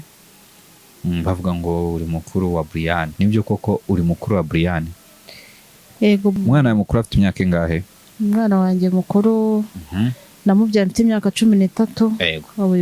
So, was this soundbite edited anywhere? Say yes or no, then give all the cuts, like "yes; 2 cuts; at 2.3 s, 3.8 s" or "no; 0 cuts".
yes; 2 cuts; at 3.1 s, 6.3 s